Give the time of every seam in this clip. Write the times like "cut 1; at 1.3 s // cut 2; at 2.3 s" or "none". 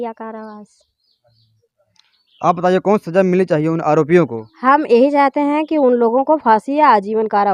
none